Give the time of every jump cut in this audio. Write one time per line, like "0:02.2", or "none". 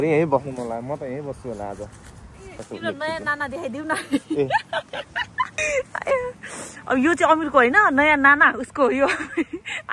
0:02.5
0:05.6